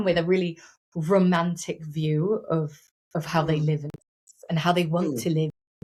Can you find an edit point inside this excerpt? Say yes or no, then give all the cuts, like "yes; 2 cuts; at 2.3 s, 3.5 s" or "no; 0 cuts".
no; 0 cuts